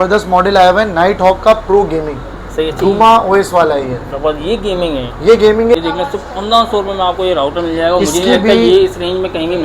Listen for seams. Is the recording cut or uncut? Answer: cut